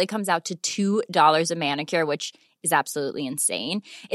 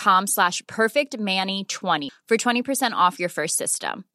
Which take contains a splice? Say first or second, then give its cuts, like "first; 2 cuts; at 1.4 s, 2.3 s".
second; 1 cut; at 2.1 s